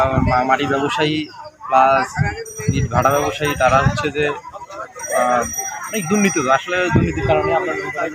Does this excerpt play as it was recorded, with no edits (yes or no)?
yes